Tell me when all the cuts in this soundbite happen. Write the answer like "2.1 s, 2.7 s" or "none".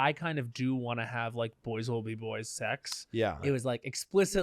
3.4 s